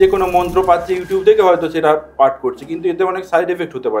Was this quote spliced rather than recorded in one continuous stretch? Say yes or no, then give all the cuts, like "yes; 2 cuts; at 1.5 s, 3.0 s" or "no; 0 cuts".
no; 0 cuts